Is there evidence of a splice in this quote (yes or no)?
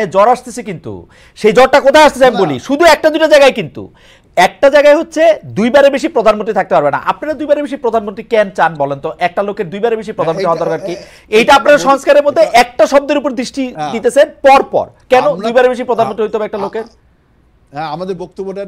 no